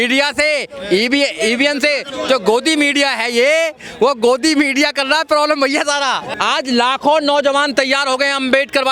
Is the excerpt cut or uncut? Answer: cut